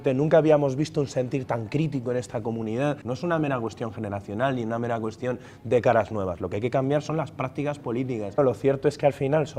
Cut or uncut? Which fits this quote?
cut